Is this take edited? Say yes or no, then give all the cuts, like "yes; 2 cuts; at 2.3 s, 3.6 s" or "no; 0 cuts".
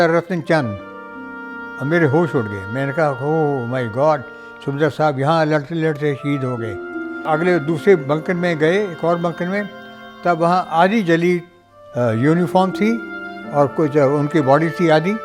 yes; 1 cut; at 7.2 s